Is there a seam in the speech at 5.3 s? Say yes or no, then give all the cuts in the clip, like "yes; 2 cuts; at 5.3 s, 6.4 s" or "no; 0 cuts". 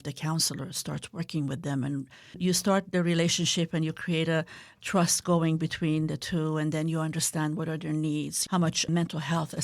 no; 2 cuts; at 2.4 s, 8.4 s